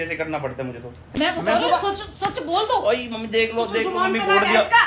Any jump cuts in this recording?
yes; 1 cut; at 1.0 s

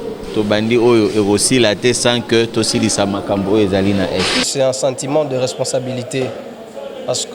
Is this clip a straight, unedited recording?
no; 1 cut; at 4.5 s

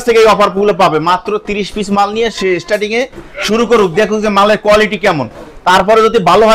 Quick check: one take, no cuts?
yes; 0 cuts

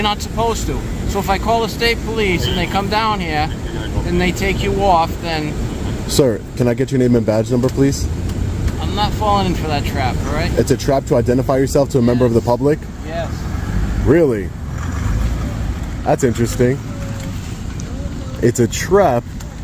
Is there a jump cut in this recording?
no; 0 cuts

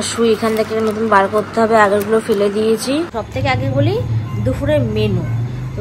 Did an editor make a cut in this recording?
yes; 1 cut; at 3.2 s

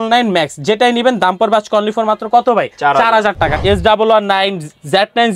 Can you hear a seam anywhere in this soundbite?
yes; 1 cut; at 3.6 s

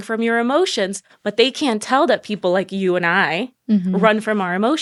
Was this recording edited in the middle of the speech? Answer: no; 0 cuts

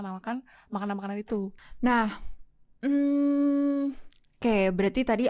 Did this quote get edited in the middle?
yes; 1 cut; at 1.5 s

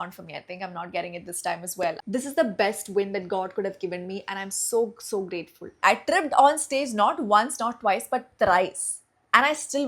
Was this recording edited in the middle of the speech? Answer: yes; 2 cuts; at 2.0 s, 5.8 s

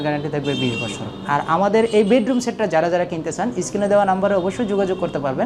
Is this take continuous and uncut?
yes; 0 cuts

